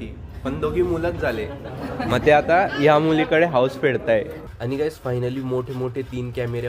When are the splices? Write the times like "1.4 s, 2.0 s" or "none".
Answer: 4.4 s